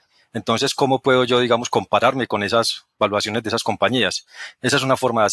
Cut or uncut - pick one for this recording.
uncut